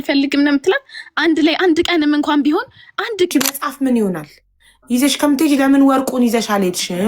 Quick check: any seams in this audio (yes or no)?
yes